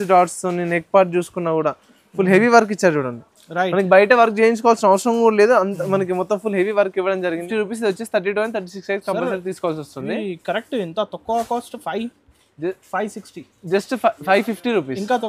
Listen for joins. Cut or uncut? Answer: cut